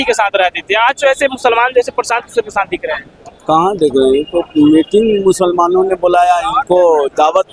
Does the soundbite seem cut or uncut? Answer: uncut